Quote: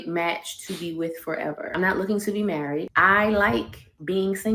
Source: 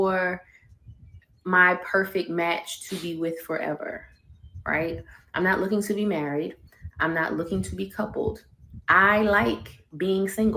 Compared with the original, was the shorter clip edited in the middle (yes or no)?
yes